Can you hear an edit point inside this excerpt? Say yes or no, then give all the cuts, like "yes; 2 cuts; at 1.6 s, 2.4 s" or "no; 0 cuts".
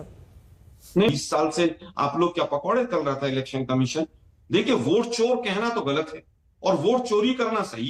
yes; 1 cut; at 1.1 s